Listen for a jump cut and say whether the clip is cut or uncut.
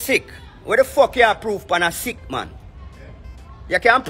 uncut